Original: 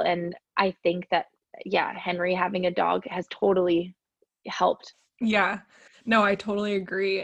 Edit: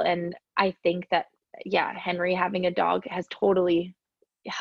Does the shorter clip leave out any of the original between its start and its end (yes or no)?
no